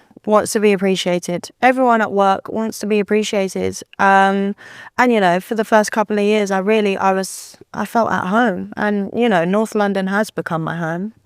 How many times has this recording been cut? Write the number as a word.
zero